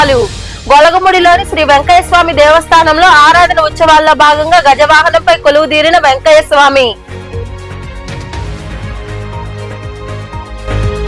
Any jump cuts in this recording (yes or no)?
no